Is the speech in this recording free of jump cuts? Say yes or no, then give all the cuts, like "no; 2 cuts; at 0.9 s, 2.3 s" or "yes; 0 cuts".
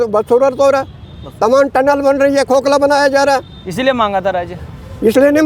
yes; 0 cuts